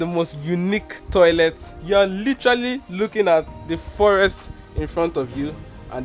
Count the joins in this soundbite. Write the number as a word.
two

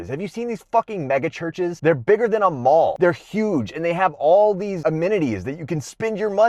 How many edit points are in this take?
three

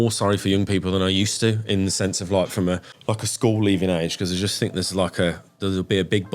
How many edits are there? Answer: one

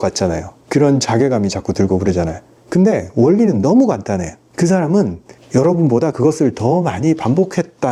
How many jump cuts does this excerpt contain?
zero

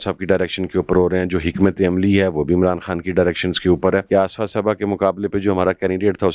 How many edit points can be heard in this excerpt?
one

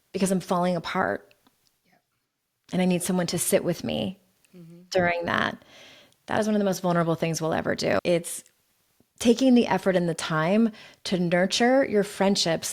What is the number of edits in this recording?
one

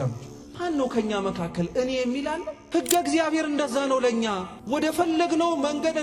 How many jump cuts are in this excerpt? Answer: one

